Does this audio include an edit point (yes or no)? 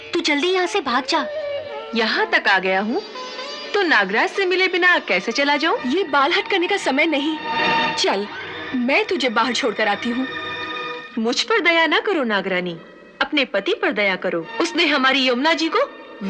yes